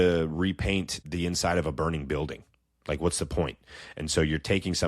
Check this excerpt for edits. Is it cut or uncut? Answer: cut